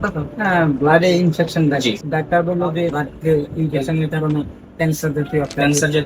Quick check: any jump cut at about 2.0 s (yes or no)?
yes